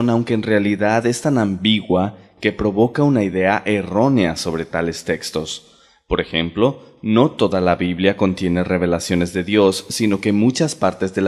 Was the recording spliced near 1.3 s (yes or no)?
no